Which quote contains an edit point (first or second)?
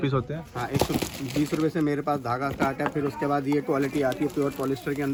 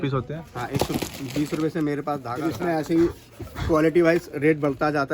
second